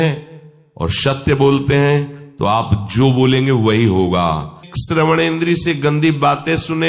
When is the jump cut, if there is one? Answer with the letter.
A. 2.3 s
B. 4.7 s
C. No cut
B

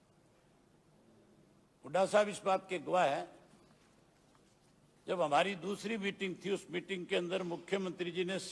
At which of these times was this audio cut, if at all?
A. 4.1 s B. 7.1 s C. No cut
C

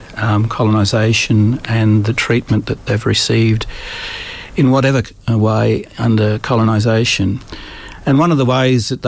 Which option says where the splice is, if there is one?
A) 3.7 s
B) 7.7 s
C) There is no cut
C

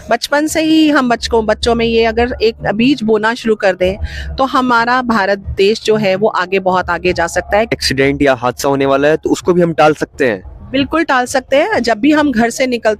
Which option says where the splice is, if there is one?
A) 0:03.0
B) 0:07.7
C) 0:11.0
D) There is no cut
B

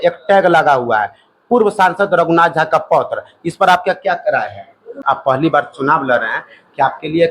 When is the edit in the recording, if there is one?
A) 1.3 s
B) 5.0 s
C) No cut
B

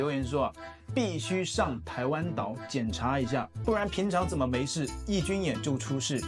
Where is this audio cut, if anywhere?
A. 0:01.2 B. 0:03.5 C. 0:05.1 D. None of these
B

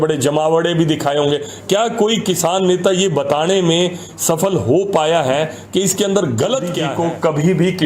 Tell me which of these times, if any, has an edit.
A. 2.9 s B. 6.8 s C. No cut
B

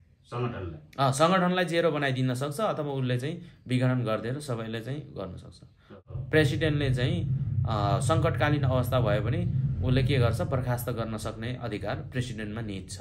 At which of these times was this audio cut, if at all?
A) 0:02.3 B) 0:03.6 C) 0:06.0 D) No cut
C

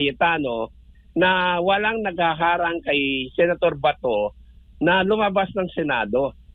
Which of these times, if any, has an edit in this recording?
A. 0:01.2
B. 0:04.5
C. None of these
C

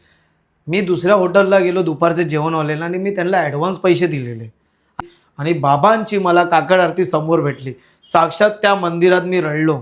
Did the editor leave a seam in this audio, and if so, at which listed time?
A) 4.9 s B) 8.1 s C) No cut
A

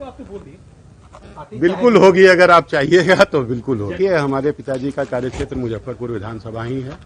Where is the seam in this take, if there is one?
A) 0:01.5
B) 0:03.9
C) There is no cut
B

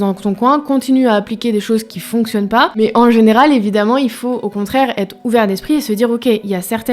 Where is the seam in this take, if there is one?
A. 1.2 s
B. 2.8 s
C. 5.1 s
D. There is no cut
B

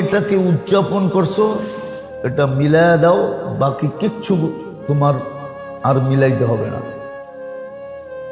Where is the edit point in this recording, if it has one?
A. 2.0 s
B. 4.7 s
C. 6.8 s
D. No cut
D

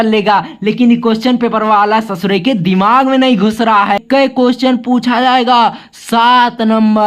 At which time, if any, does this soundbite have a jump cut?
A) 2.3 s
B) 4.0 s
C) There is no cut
B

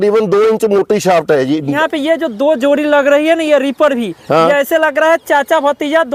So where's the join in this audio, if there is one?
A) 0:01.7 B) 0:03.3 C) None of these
A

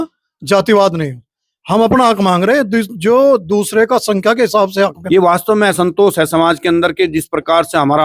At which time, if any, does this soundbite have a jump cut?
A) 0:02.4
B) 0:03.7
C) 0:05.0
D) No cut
C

